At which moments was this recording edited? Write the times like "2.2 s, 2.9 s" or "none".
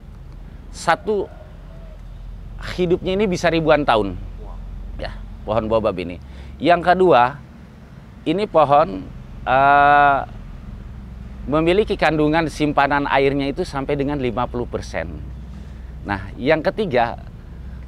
none